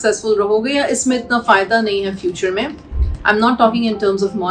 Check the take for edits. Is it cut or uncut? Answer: uncut